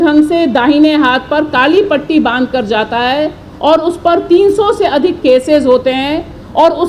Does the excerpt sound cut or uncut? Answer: uncut